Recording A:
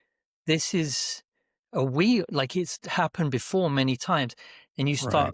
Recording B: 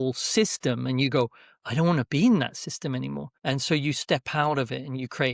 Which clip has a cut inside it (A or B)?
B